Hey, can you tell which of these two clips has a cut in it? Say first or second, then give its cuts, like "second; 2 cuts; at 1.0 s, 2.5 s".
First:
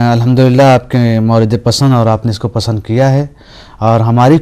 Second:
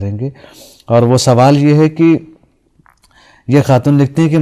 first; 1 cut; at 1.8 s